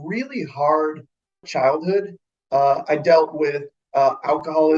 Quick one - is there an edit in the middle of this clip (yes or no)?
yes